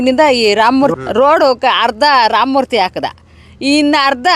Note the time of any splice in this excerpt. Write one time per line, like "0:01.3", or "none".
0:00.9